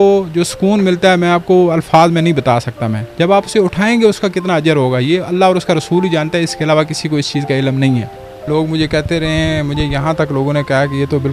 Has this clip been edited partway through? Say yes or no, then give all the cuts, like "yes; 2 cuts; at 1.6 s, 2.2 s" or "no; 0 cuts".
yes; 2 cuts; at 3.0 s, 8.5 s